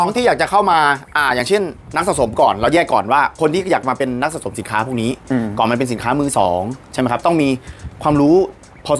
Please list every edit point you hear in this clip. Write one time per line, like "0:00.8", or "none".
none